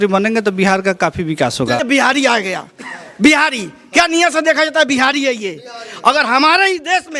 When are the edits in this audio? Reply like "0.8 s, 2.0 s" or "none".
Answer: 1.8 s